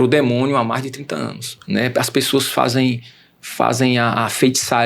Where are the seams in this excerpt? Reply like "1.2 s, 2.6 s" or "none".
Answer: 1.4 s